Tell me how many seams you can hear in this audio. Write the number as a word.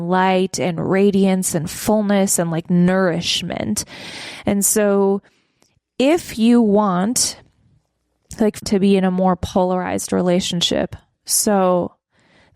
one